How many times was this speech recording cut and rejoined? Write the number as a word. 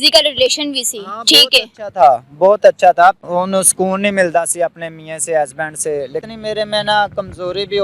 two